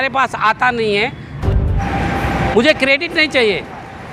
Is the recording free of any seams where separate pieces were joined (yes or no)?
no